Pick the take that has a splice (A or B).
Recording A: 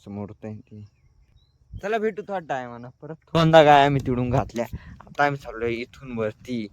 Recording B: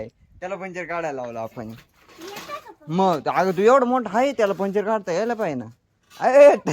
A